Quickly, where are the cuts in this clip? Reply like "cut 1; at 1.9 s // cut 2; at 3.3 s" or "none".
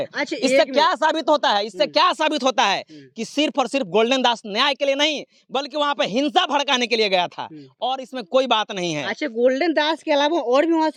none